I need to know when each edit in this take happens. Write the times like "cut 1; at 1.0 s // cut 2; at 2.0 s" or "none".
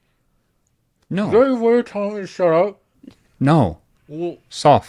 none